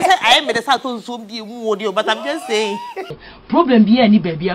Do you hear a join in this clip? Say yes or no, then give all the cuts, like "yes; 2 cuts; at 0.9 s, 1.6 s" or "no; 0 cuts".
yes; 1 cut; at 3.0 s